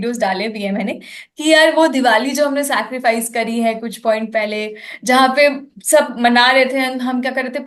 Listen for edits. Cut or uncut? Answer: uncut